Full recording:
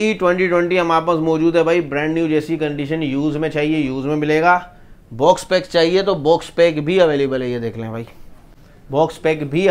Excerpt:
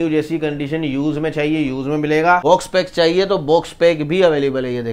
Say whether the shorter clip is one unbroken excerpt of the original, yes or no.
no